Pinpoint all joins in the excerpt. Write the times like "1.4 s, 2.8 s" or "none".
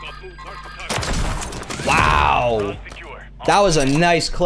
1.9 s